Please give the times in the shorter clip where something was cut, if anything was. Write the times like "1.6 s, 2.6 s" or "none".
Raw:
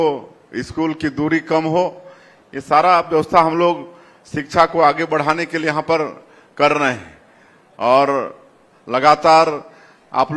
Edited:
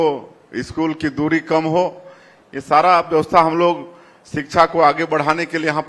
none